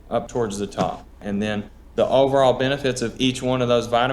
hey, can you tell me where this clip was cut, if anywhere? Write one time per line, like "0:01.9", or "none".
0:01.2

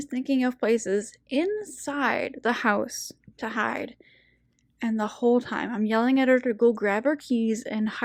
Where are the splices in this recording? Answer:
none

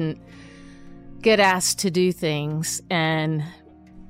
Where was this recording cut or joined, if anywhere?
none

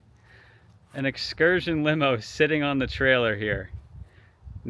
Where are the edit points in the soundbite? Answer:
none

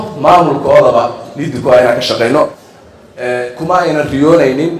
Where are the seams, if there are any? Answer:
0:02.6

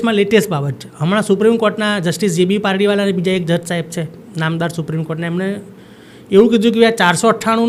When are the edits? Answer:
none

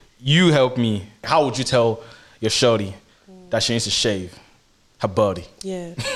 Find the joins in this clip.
0:01.3

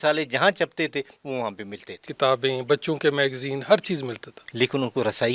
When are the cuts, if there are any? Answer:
0:02.1
0:04.4

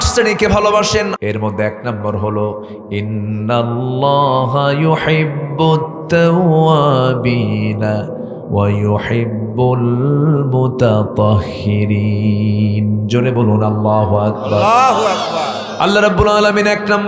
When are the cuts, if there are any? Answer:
0:01.1

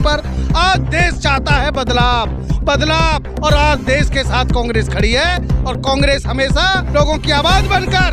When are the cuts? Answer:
none

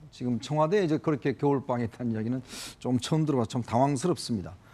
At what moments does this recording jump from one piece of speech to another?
0:01.0

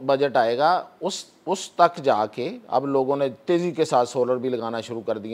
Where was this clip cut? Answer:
none

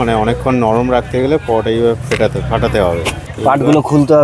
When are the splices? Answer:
0:03.2

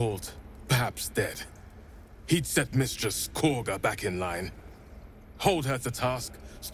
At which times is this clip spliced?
none

